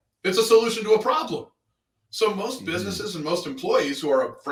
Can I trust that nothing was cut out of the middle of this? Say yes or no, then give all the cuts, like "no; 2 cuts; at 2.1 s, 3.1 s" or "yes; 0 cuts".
yes; 0 cuts